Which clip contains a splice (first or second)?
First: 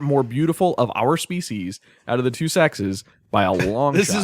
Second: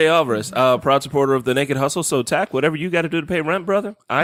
first